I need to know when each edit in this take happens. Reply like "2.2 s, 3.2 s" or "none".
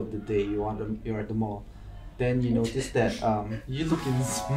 3.6 s